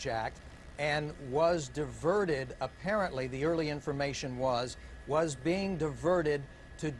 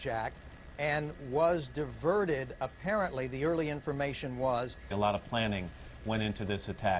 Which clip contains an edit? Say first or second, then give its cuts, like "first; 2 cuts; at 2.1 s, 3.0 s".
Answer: first; 1 cut; at 4.8 s